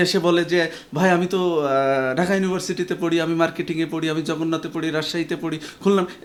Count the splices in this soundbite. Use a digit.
0